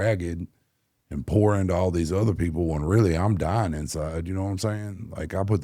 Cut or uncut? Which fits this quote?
uncut